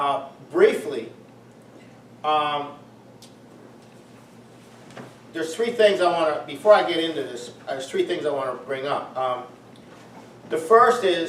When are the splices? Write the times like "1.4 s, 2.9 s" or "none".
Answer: none